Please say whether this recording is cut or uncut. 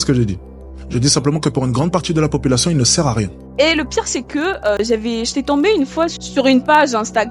cut